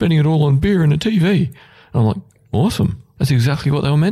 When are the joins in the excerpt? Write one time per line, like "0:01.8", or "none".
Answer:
none